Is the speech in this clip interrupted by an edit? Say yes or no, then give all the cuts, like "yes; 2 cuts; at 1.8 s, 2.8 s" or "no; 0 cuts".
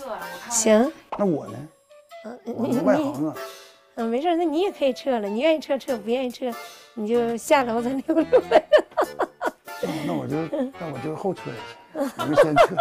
no; 0 cuts